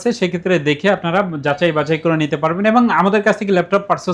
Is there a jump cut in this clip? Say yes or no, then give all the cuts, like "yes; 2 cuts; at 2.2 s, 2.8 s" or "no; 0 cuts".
no; 0 cuts